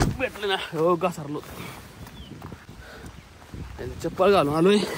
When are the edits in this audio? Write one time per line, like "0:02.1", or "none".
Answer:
none